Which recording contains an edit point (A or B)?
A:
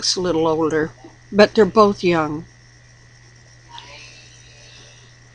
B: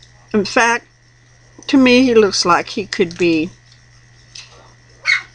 B